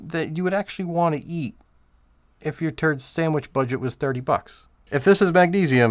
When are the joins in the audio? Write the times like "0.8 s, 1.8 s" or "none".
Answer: 4.9 s